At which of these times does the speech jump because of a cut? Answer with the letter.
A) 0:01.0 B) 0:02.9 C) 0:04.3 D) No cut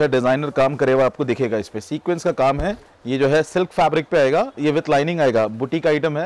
B